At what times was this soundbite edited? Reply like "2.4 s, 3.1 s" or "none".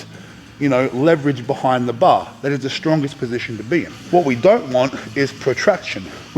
4.0 s